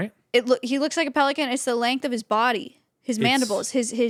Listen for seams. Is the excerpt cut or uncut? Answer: uncut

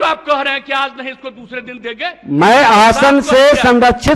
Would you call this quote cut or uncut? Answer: uncut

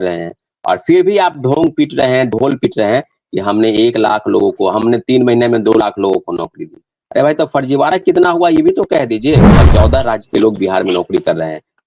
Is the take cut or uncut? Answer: cut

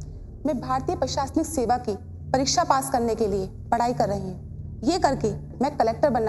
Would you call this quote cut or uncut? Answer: uncut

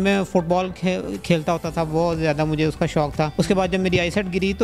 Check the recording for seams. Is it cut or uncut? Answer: cut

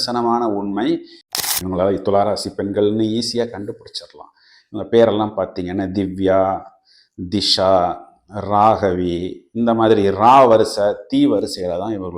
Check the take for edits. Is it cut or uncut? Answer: cut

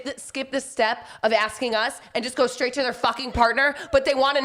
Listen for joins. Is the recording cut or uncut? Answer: uncut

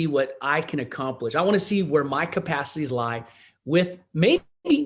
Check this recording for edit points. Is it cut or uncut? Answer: uncut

